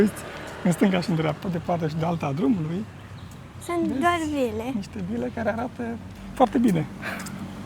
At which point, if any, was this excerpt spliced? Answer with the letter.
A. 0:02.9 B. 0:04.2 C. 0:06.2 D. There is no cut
C